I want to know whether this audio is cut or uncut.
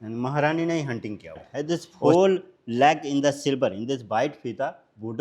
cut